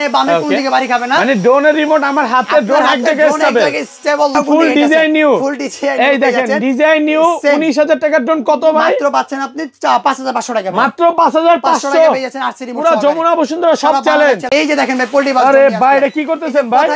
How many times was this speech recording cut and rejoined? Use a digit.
2